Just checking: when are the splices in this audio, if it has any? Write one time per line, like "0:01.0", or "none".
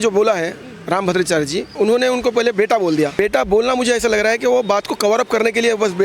0:01.7
0:03.1